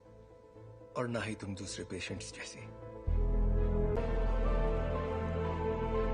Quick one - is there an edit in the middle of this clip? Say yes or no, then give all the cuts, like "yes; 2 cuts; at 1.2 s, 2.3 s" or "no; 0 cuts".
yes; 1 cut; at 4.0 s